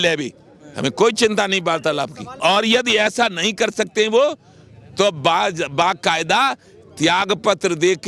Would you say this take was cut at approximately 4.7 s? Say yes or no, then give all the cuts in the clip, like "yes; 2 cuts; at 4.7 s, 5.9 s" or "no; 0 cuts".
no; 1 cut; at 2.4 s